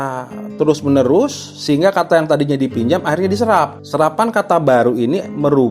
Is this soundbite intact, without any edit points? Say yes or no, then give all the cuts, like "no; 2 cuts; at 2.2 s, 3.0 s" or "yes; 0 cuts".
no; 1 cut; at 3.8 s